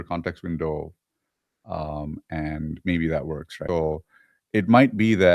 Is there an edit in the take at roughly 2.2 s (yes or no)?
no